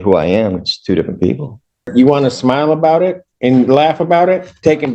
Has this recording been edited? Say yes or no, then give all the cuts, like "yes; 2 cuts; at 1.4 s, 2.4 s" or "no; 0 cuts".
yes; 1 cut; at 1.9 s